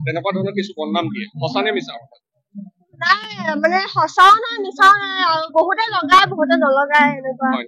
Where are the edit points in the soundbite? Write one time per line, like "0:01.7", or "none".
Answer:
none